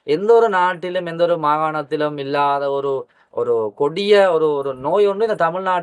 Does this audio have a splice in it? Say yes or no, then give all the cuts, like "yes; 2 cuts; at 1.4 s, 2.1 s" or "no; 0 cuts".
no; 0 cuts